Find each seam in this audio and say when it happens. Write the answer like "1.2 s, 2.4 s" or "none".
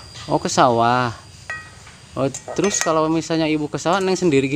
none